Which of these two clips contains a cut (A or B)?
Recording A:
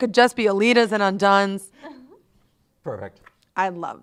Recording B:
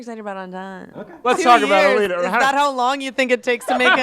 B